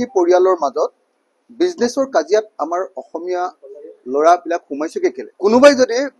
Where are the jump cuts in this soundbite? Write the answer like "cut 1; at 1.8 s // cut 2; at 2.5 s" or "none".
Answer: cut 1; at 5.3 s